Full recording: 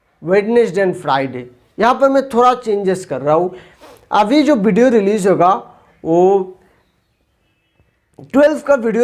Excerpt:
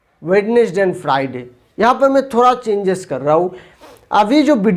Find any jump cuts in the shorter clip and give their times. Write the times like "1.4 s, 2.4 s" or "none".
none

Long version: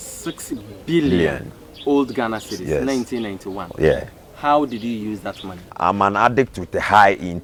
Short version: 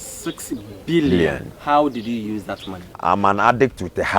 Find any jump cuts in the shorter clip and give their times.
1.5 s

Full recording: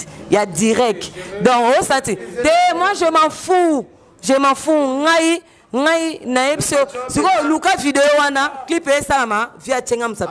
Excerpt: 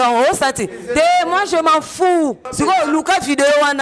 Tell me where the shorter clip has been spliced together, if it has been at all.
2.4 s

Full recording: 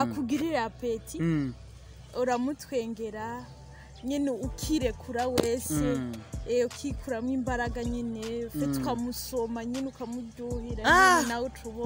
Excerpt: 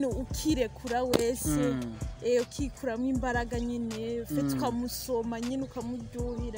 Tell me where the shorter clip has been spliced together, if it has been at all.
none

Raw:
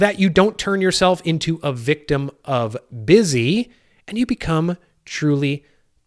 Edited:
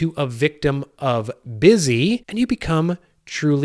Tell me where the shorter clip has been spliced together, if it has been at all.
2.3 s

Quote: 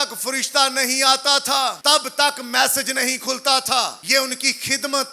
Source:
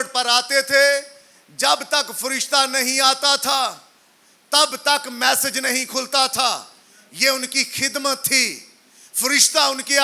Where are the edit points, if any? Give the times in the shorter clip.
1.8 s, 4.0 s

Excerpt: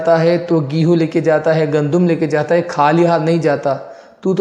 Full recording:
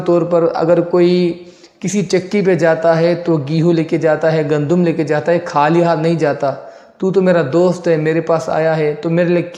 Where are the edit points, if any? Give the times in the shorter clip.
none

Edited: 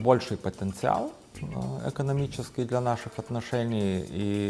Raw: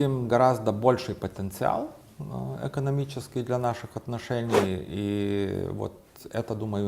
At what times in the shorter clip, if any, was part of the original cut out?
none

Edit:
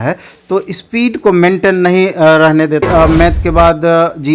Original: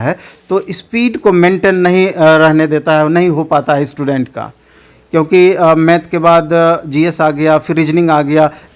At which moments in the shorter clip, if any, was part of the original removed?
2.8 s

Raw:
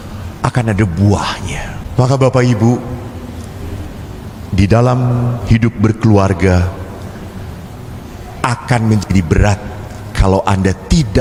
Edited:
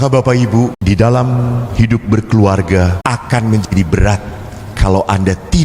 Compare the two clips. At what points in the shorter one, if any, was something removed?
0.8 s, 3.0 s

